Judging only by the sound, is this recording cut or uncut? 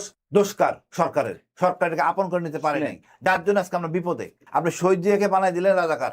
cut